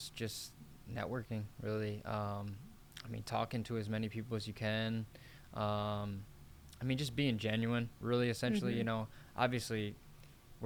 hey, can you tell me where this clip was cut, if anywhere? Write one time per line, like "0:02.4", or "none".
none